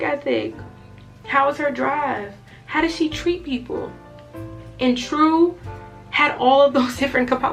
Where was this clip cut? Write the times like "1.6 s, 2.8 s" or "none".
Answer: none